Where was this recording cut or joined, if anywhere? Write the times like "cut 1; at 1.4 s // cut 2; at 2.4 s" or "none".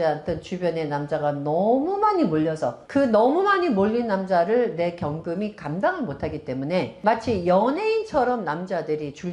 cut 1; at 2.8 s // cut 2; at 6.9 s